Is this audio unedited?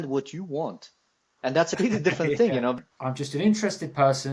no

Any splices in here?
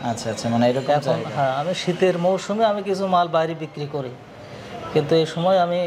no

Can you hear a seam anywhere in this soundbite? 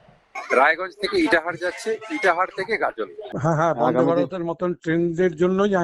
yes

